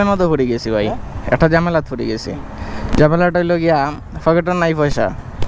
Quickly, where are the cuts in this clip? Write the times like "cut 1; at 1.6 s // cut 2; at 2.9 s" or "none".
none